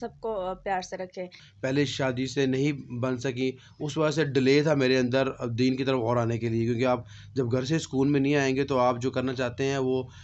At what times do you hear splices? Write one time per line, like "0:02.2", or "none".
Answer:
0:01.4